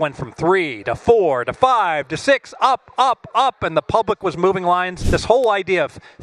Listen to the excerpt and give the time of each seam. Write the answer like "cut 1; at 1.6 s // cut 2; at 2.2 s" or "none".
cut 1; at 5.0 s